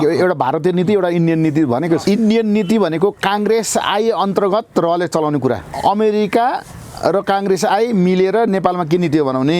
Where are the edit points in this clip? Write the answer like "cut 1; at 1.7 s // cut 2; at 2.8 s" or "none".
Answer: cut 1; at 2.0 s // cut 2; at 5.7 s

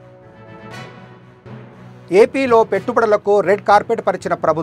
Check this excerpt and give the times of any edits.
none

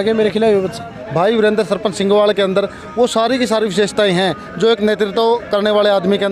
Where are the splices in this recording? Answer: cut 1; at 1.0 s

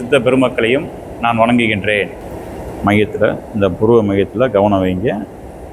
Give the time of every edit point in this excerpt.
none

